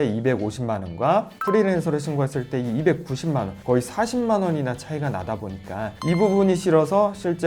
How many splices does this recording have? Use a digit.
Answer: 0